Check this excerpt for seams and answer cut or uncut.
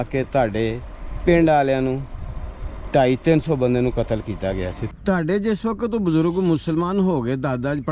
cut